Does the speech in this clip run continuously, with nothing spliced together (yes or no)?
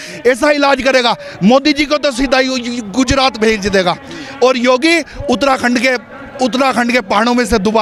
yes